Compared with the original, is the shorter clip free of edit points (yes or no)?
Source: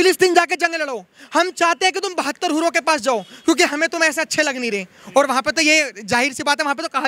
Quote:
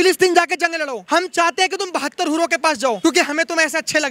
no